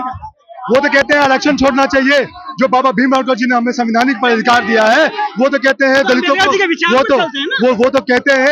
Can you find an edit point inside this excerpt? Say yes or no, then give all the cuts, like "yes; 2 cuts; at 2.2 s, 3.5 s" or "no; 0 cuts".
no; 0 cuts